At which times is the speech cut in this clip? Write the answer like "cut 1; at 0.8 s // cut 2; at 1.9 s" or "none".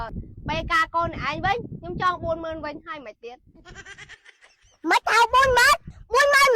none